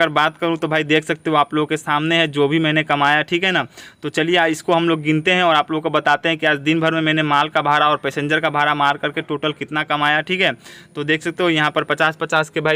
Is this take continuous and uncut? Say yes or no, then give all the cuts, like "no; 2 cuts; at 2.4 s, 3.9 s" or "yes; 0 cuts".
yes; 0 cuts